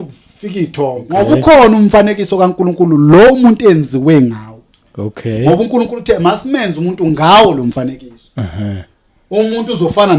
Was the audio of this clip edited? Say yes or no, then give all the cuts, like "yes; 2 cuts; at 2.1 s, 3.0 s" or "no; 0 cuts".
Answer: yes; 1 cut; at 1.0 s